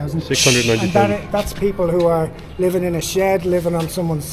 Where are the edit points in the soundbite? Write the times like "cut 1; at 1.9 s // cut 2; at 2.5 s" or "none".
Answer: none